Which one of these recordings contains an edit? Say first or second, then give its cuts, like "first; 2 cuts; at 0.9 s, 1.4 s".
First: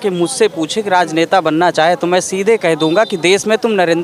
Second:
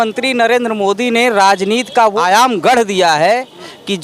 second; 1 cut; at 2.1 s